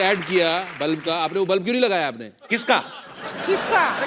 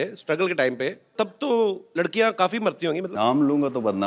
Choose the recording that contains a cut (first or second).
second